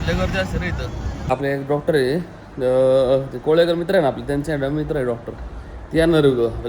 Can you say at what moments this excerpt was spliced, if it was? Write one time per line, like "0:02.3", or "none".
0:01.2